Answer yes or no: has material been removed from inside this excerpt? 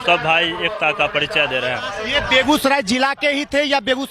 no